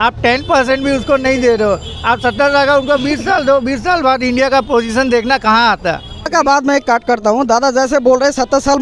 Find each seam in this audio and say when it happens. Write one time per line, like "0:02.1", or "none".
0:06.3